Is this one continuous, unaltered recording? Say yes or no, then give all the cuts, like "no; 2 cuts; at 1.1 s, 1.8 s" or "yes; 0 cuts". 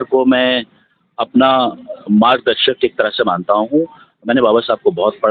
yes; 0 cuts